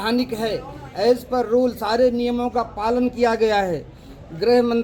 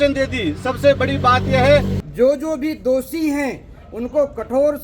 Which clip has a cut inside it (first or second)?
second